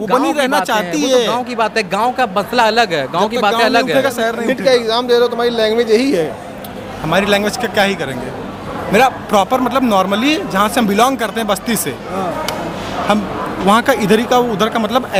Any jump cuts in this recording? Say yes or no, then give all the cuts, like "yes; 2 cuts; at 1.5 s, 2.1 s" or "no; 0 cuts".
no; 0 cuts